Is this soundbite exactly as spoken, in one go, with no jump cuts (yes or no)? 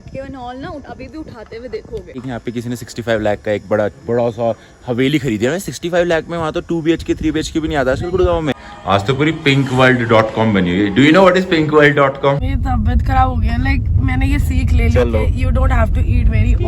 no